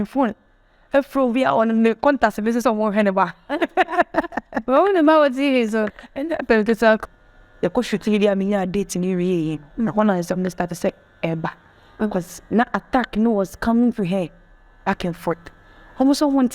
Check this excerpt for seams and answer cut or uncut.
cut